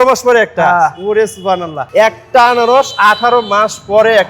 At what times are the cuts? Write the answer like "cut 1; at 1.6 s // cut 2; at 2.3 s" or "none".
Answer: cut 1; at 1.8 s